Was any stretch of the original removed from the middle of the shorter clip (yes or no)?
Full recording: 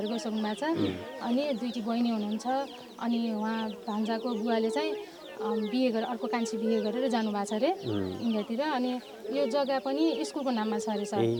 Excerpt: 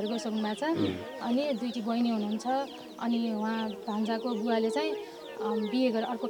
no